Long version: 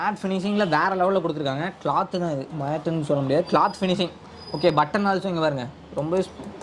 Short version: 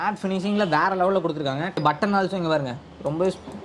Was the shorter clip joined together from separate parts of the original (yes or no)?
yes